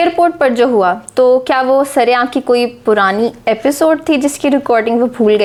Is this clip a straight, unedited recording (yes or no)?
yes